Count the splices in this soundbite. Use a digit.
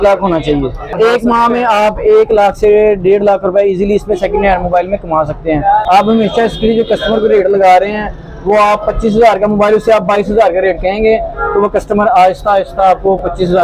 2